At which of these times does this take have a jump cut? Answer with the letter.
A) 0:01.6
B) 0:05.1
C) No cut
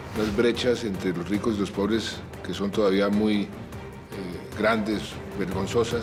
C